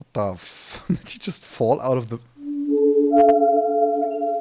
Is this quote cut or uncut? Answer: uncut